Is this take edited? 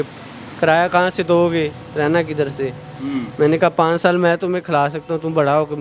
no; 0 cuts

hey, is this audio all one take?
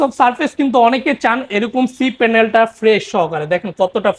yes; 0 cuts

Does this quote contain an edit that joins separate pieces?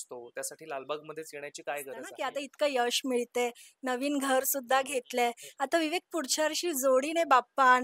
yes; 1 cut; at 2.1 s

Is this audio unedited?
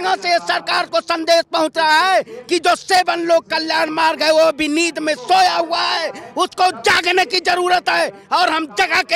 yes; 0 cuts

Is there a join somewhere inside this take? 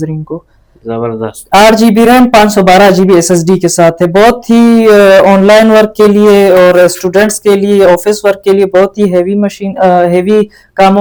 no; 0 cuts

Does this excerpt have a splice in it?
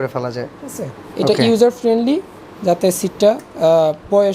no; 0 cuts

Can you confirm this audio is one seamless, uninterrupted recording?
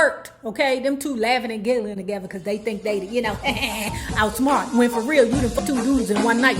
no; 1 cut; at 5.6 s

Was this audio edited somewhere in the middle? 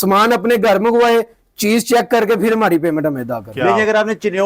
yes; 1 cut; at 3.4 s

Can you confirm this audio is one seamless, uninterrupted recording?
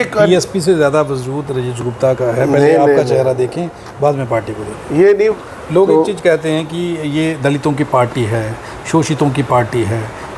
no; 1 cut; at 5.4 s

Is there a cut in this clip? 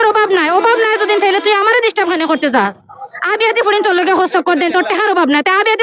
no; 0 cuts

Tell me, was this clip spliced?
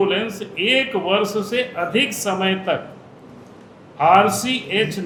no; 0 cuts

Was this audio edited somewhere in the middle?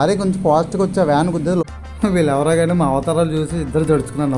yes; 1 cut; at 1.6 s

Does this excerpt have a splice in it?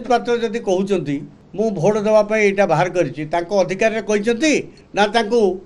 yes; 2 cuts; at 1.4 s, 4.8 s

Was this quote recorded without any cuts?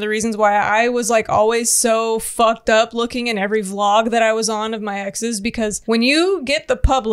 no; 1 cut; at 5.8 s

